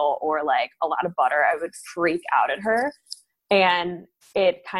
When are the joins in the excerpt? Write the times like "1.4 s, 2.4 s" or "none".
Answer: none